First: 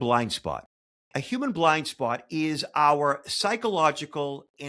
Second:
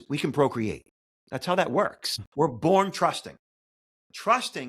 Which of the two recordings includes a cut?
second; 1 cut; at 2.2 s

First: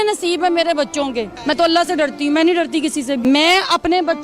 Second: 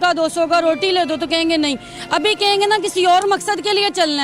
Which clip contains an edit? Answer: first; 2 cuts; at 1.3 s, 3.2 s

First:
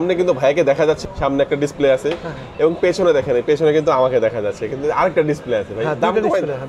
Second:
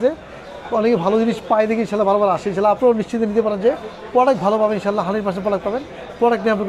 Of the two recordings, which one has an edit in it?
first; 1 cut; at 1.0 s

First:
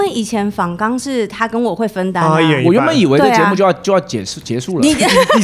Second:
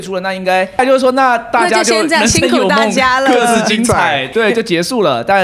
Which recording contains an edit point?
second; 2 cuts; at 0.8 s, 4.3 s

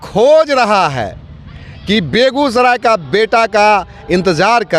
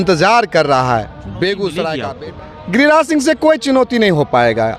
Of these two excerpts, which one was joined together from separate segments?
second; 1 cut; at 2.1 s

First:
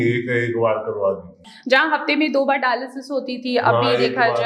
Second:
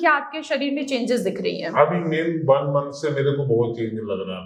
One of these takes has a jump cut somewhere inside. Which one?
first; 1 cut; at 1.3 s

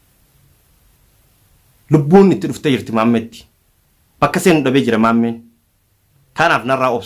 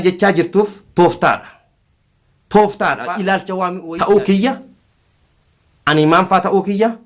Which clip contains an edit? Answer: second; 1 cut; at 3.8 s

